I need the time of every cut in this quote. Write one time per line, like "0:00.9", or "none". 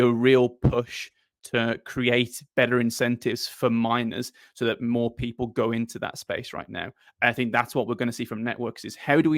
none

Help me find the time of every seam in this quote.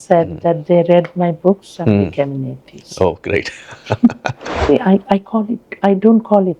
0:04.7

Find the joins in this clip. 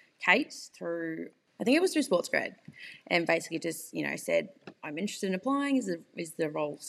0:01.4

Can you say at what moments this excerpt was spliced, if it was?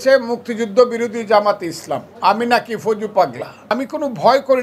0:03.7

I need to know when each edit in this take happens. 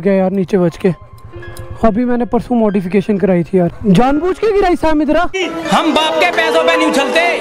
0:03.8
0:05.5

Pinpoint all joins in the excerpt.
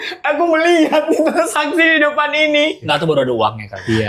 0:02.8

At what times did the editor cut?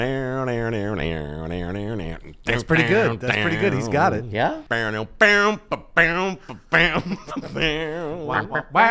0:04.6

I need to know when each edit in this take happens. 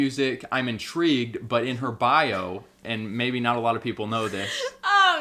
none

